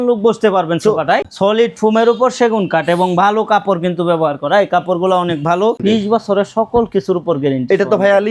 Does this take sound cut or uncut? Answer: cut